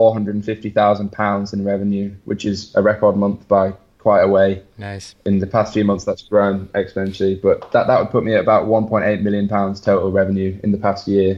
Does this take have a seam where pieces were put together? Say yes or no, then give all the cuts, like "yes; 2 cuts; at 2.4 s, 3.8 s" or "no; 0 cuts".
no; 0 cuts